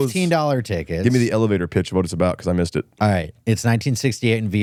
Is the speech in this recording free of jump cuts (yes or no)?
yes